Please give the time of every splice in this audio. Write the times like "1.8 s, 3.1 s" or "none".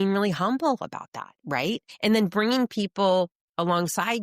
1.9 s